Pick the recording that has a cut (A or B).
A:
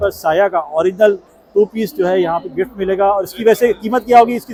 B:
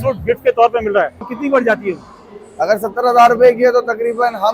B